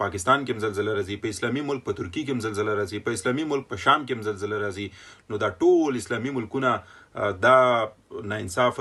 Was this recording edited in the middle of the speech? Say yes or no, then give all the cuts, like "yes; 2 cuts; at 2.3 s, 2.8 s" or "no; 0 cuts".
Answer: no; 0 cuts